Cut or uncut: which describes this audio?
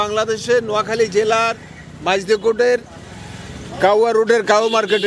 uncut